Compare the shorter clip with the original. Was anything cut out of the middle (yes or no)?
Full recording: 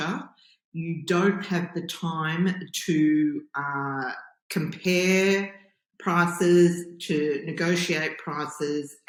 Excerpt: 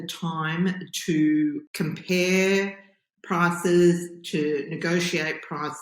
yes